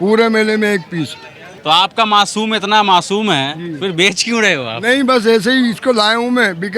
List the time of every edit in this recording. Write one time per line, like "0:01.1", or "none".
0:01.5